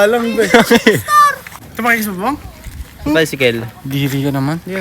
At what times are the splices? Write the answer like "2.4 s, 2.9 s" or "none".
1.5 s